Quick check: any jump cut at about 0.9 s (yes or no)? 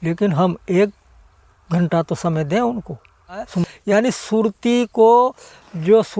no